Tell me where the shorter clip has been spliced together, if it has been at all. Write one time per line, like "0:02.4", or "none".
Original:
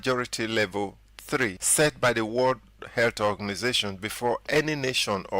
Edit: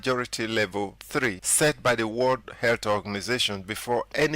0:01.0
0:02.5